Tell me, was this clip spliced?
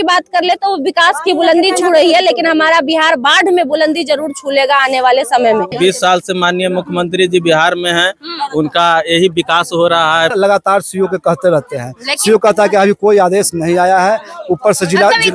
yes; 2 cuts; at 5.8 s, 10.3 s

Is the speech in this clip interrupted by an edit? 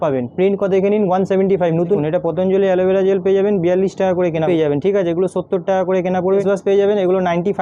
yes; 3 cuts; at 2.0 s, 4.4 s, 6.4 s

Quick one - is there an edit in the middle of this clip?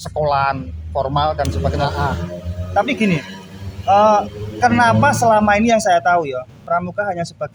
no; 0 cuts

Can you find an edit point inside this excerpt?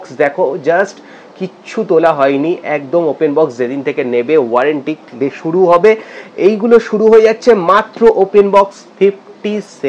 no; 0 cuts

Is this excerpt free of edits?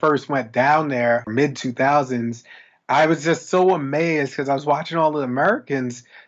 no; 1 cut; at 1.3 s

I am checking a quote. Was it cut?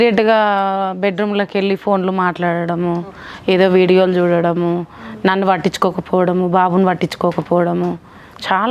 no; 0 cuts

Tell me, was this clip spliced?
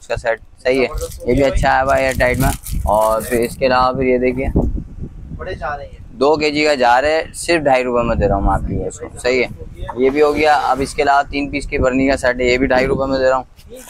no; 0 cuts

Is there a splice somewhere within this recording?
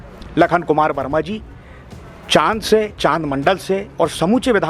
no; 0 cuts

